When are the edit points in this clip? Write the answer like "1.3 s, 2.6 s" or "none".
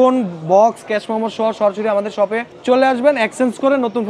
2.5 s